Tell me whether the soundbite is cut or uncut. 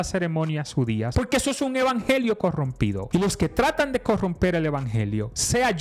cut